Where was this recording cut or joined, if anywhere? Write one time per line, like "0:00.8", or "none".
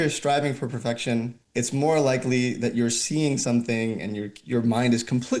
0:01.4